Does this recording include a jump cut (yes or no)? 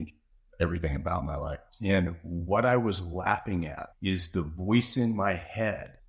no